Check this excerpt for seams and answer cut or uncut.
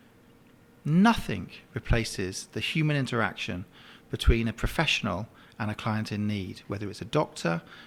uncut